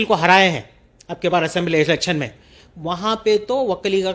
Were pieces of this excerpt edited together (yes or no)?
no